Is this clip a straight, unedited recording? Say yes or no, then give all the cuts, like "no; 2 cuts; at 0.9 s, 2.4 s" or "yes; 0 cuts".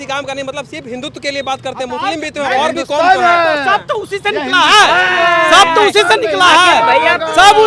yes; 0 cuts